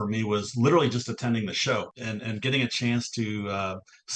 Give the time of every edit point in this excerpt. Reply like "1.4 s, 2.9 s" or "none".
1.9 s